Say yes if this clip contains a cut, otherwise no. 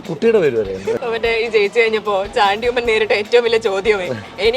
yes